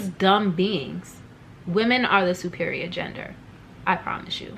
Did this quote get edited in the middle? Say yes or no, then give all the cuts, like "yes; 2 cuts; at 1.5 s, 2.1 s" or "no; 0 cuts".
no; 0 cuts